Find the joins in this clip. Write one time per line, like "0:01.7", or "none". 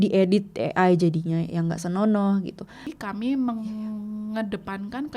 0:02.9